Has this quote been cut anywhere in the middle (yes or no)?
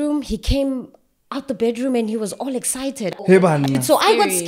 yes